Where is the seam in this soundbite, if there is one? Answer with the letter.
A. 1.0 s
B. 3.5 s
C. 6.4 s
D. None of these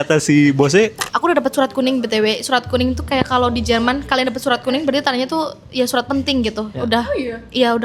A